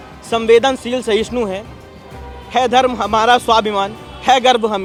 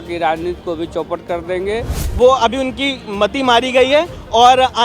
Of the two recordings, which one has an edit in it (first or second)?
second